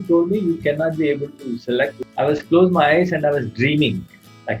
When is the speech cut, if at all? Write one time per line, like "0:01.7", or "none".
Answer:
0:02.0